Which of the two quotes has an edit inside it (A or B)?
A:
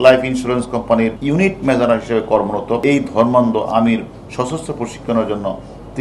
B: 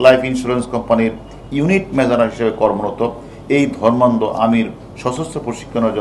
A